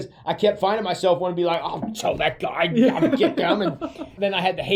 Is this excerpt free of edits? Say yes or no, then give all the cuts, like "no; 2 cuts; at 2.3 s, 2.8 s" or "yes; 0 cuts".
yes; 0 cuts